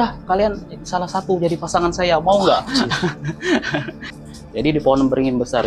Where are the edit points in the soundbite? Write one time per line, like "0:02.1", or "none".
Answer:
0:04.1